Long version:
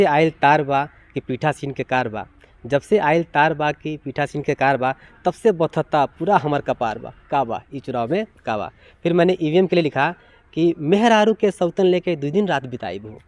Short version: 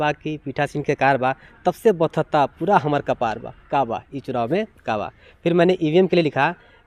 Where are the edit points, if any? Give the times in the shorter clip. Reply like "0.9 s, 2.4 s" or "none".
none